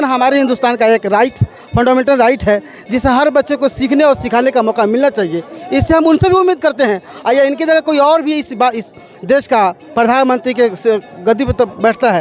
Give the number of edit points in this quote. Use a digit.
0